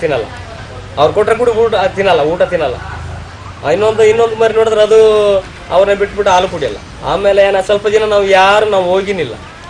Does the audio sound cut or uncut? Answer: uncut